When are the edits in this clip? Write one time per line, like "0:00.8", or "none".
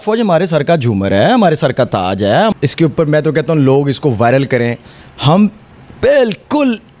0:02.5